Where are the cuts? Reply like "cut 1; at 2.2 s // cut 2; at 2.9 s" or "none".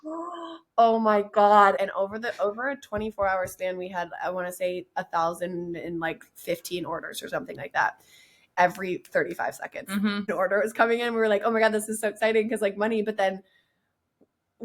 cut 1; at 1.8 s // cut 2; at 8.5 s // cut 3; at 10.3 s